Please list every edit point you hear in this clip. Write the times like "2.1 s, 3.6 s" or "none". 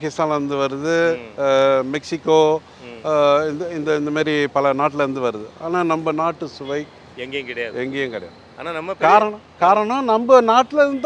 none